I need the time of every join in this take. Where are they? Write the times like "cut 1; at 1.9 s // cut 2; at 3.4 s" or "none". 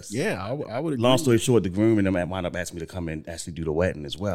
cut 1; at 1.0 s